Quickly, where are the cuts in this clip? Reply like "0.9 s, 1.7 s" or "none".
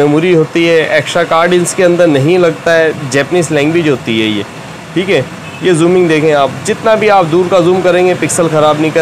none